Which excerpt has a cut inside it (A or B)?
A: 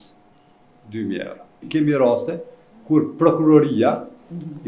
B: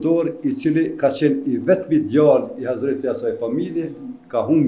A